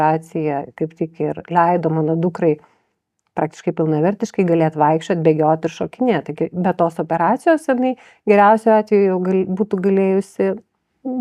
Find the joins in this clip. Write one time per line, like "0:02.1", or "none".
none